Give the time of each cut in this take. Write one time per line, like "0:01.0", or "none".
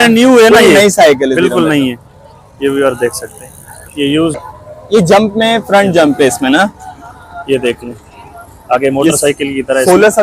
0:04.4